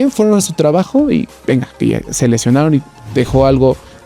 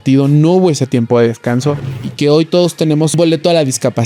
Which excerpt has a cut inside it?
second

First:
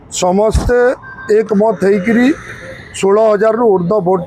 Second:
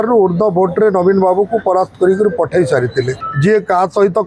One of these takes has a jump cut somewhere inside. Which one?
second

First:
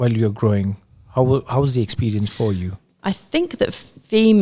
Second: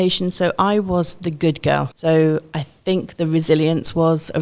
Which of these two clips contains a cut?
second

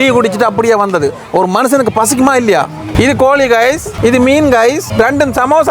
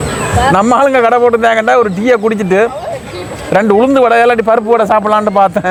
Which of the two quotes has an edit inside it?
first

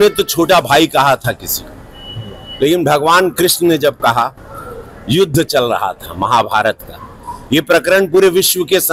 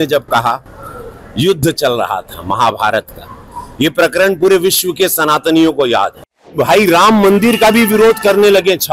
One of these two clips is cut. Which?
second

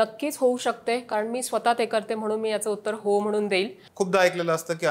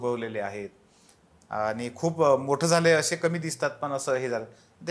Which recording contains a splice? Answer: first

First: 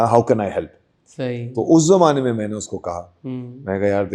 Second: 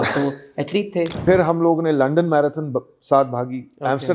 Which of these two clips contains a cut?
second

